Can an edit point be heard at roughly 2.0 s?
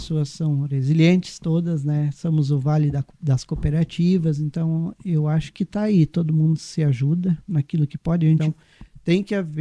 no; 1 cut; at 8.4 s

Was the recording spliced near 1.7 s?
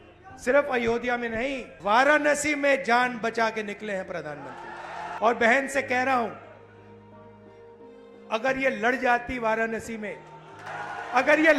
yes; 3 cuts; at 1.7 s, 5.1 s, 10.7 s

